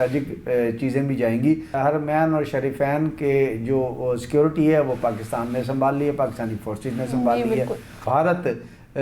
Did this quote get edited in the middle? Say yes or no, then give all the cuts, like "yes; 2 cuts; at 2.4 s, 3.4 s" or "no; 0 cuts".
yes; 2 cuts; at 1.8 s, 8.0 s